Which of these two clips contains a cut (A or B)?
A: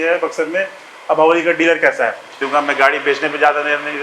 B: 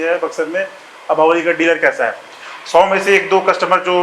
A